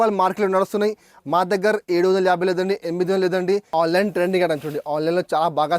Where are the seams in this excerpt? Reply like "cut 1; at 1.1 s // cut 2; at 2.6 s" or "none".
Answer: cut 1; at 3.7 s